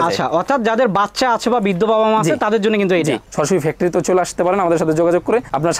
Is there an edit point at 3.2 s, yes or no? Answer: yes